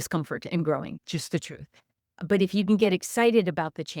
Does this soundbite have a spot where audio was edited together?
yes; 1 cut; at 1.0 s

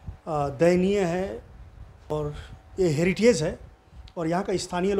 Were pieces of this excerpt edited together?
yes; 1 cut; at 2.1 s

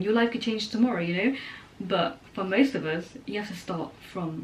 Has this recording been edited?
no; 0 cuts

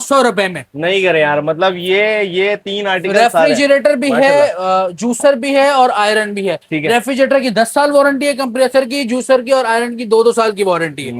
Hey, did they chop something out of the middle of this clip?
no; 0 cuts

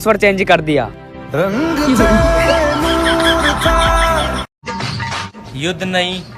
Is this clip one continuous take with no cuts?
no; 1 cut; at 4.6 s

